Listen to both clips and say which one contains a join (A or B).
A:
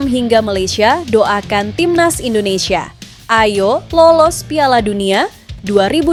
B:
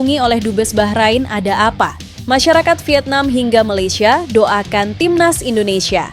B